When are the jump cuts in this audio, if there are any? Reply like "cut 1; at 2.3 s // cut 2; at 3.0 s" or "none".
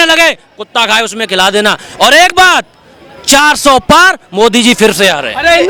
none